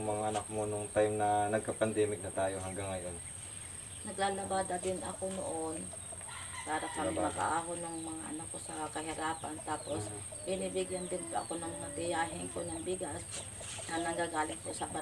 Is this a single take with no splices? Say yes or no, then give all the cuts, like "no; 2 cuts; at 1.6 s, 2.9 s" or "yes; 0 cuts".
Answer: yes; 0 cuts